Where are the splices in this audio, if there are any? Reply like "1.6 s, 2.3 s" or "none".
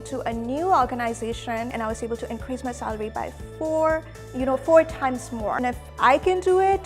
1.7 s, 5.6 s